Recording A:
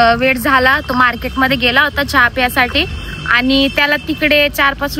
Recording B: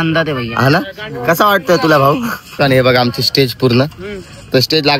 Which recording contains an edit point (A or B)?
B